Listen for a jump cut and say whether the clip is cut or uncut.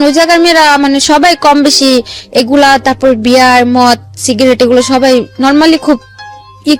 uncut